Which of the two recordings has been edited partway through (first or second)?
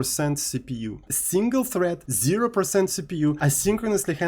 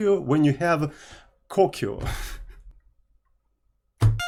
first